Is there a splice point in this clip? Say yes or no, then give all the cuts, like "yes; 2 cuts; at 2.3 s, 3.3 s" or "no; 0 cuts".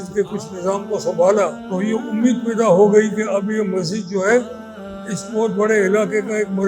yes; 1 cut; at 1.6 s